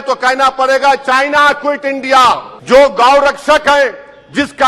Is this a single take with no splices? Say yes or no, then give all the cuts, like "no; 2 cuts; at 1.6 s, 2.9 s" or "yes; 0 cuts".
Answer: no; 1 cut; at 2.5 s